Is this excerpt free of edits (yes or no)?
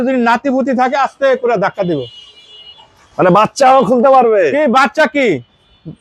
yes